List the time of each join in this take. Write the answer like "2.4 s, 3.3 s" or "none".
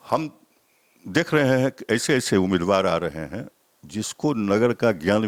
none